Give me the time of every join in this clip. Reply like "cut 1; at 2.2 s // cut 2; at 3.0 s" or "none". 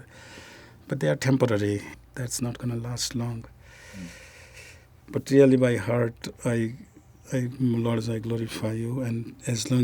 cut 1; at 1.9 s